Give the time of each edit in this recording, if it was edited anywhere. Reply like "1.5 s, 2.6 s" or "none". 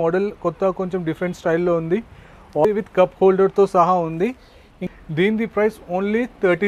2.6 s, 4.7 s